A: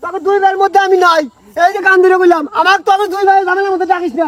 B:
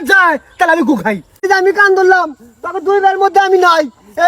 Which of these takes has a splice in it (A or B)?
B